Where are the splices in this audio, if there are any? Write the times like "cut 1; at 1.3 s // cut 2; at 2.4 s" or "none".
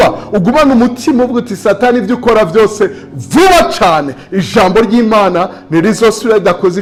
none